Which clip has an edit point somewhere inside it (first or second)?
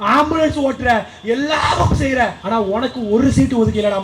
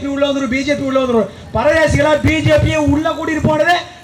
first